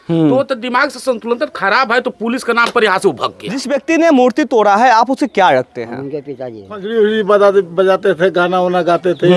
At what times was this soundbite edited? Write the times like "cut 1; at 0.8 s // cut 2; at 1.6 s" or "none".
cut 1; at 3.7 s // cut 2; at 6.8 s